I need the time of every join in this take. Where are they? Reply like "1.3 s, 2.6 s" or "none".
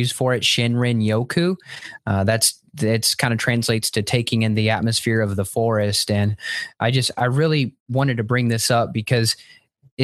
none

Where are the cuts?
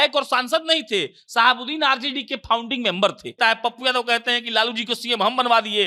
3.4 s

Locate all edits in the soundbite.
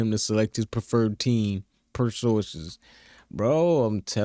none

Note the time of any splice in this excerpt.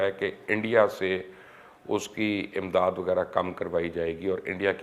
none

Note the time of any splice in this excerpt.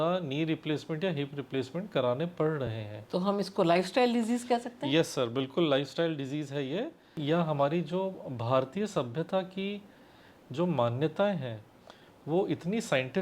7.2 s

